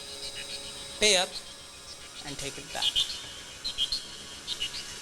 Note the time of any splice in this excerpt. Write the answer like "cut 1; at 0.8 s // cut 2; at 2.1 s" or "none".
none